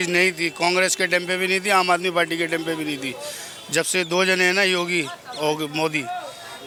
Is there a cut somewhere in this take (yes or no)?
no